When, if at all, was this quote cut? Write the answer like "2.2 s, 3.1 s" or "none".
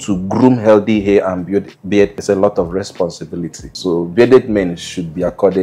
none